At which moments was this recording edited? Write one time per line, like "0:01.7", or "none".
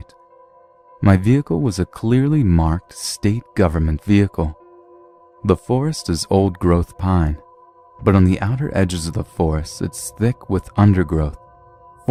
none

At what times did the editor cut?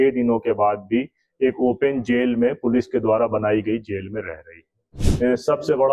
0:05.0

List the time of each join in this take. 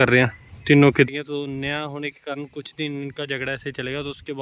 0:01.0

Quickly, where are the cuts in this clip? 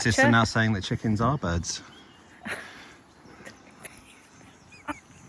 none

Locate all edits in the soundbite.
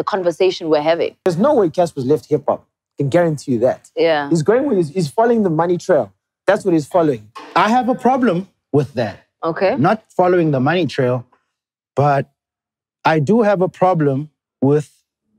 0:01.3

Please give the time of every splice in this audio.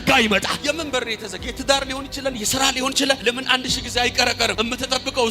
none

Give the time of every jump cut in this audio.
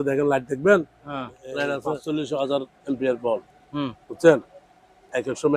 0:01.9

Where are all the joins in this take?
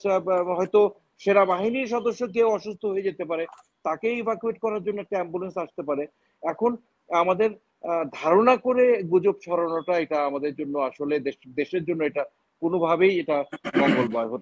none

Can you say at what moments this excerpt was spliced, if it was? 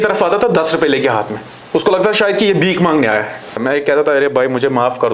0:03.6

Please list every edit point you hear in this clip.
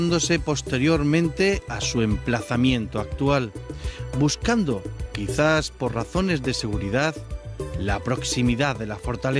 0:01.1

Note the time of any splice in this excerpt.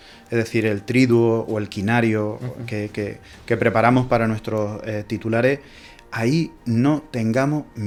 none

